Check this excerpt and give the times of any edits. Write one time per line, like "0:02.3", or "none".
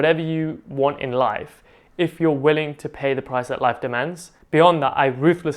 0:04.4